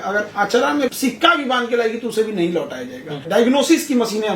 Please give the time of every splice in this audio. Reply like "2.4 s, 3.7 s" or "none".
0.9 s, 3.2 s